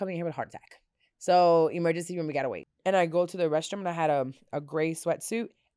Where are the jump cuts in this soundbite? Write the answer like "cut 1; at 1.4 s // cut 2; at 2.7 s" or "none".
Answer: cut 1; at 2.7 s